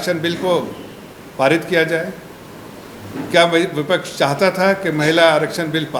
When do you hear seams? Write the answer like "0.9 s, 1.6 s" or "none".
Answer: none